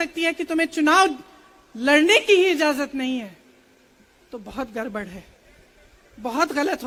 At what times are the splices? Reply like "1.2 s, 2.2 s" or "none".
none